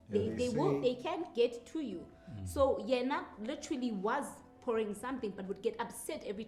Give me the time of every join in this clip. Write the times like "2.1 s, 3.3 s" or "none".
none